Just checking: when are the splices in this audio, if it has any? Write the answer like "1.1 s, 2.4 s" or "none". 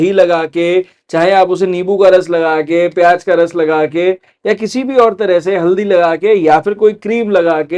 none